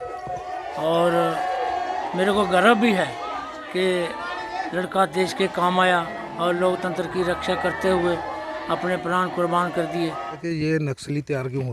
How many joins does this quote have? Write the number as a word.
one